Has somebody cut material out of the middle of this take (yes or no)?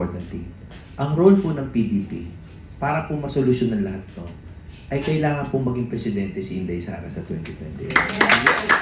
no